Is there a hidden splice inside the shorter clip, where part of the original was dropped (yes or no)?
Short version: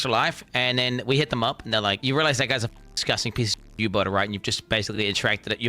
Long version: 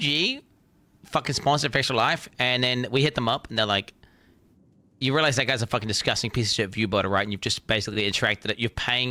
yes